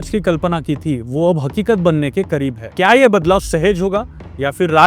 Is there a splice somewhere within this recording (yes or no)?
no